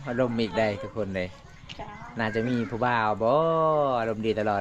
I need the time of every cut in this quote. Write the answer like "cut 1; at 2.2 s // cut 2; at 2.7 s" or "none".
none